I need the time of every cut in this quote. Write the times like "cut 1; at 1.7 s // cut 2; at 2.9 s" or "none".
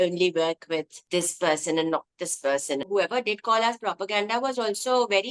cut 1; at 1.0 s // cut 2; at 2.8 s